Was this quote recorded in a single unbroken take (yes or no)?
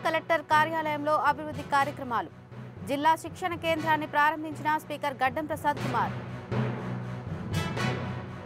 yes